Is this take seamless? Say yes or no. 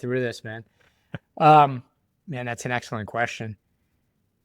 yes